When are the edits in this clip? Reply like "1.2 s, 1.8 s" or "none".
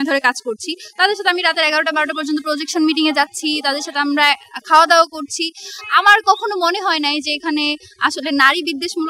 none